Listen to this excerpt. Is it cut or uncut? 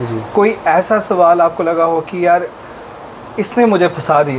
uncut